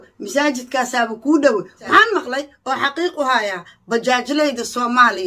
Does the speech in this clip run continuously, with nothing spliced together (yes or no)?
no